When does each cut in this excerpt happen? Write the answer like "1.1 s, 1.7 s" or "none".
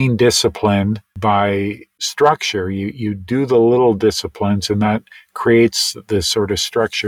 1.1 s, 1.9 s

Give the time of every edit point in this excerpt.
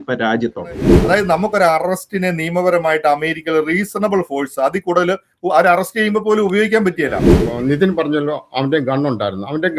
0.9 s, 7.4 s

